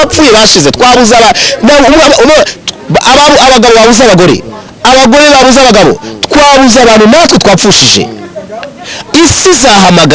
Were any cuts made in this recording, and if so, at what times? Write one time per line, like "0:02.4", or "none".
none